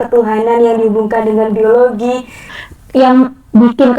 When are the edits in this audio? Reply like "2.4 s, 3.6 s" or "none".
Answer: 2.5 s